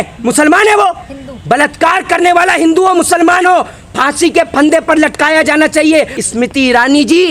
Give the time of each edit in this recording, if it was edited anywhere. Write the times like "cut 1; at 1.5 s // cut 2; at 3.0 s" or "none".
cut 1; at 6.1 s